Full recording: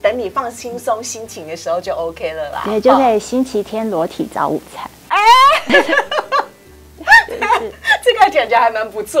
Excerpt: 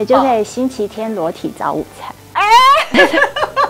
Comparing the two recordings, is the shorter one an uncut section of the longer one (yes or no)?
yes